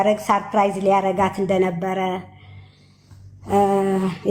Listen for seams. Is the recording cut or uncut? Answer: uncut